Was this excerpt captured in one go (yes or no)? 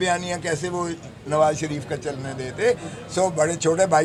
yes